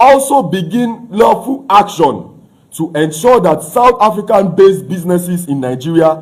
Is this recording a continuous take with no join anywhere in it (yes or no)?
yes